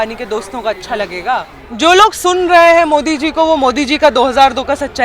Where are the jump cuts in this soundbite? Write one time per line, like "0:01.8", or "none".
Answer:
0:01.6